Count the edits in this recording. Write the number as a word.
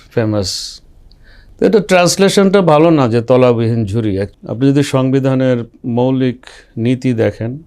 one